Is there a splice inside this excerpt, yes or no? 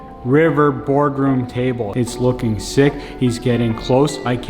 yes